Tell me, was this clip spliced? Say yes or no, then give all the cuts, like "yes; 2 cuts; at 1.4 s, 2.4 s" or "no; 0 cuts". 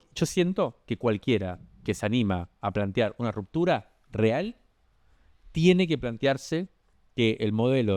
no; 0 cuts